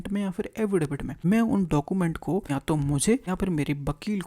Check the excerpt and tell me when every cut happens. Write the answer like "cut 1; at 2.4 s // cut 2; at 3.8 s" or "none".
cut 1; at 1.1 s // cut 2; at 2.5 s // cut 3; at 3.2 s